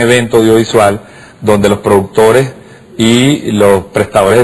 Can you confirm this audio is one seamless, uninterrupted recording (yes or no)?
no